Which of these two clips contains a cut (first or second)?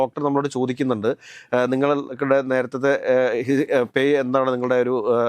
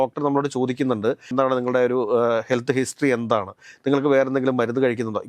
second